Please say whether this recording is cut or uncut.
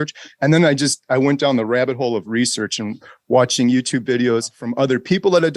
cut